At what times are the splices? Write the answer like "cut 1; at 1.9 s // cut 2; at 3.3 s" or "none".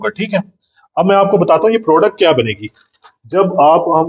none

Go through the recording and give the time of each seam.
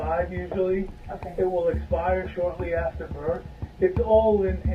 cut 1; at 3.6 s

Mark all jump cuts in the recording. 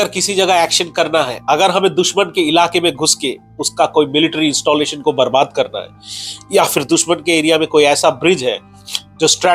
none

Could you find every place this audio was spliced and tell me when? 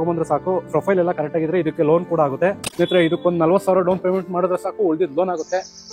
cut 1; at 2.6 s

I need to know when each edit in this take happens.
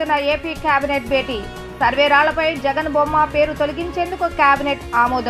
none

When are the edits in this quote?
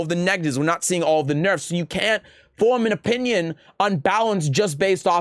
none

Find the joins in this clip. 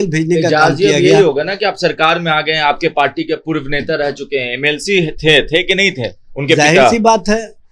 none

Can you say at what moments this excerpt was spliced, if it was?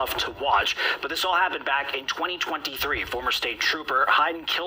cut 1; at 2.4 s

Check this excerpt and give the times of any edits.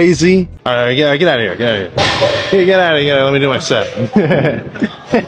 cut 1; at 1.1 s

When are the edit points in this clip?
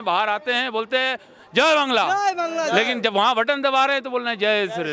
none

